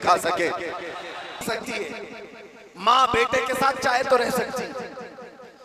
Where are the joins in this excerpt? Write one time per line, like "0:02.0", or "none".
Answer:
0:01.4

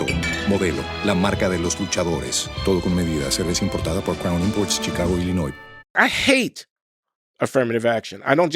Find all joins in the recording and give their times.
0:05.9

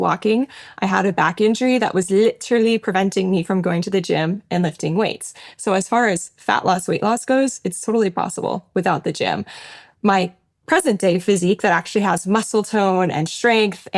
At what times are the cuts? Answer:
none

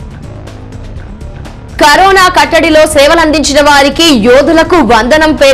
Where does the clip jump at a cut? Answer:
0:01.8

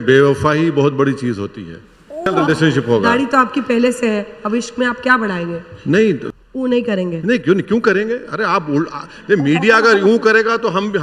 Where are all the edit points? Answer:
0:02.3
0:06.3

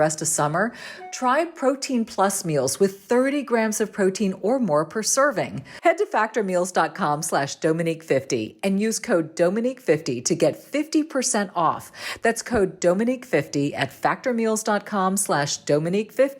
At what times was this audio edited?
0:05.6

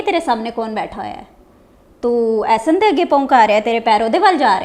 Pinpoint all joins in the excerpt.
none

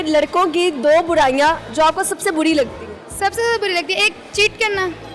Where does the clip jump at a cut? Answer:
none

